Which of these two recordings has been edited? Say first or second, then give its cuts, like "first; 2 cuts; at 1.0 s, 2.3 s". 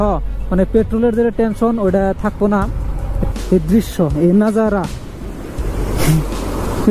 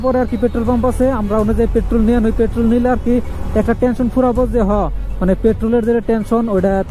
first; 1 cut; at 3.2 s